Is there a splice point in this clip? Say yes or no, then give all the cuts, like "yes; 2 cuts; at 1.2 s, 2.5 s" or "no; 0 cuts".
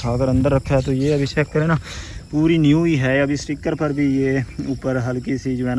no; 0 cuts